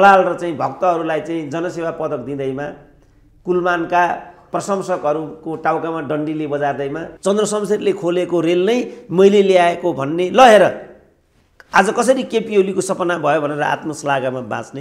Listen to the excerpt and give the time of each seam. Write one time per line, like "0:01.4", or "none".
0:04.5
0:07.1

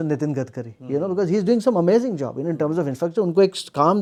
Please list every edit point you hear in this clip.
none

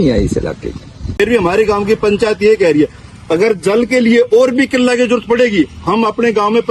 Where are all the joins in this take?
0:01.2

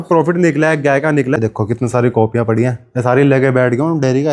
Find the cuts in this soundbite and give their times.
0:01.4

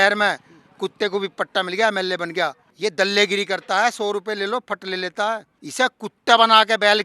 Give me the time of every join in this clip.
0:02.6
0:05.5

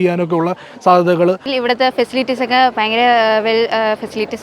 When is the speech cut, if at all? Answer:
0:01.5

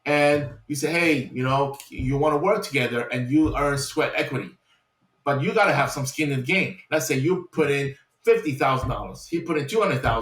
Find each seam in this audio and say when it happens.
none

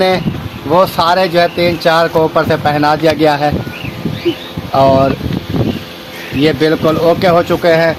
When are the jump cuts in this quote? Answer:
none

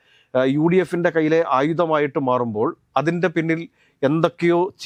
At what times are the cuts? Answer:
none

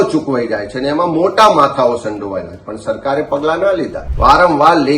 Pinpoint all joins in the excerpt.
0:04.0

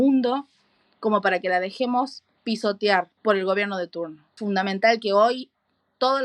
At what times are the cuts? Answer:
0:03.1
0:04.3

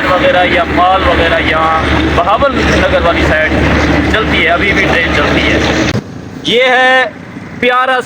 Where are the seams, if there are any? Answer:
0:05.9

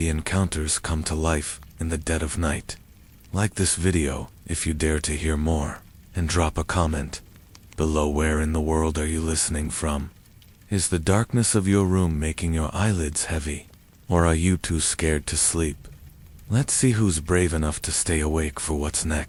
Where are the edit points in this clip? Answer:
none

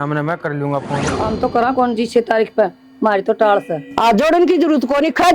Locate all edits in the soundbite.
0:01.1

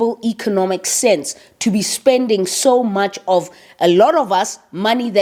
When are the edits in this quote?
none

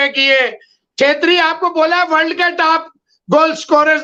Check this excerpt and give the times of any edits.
none

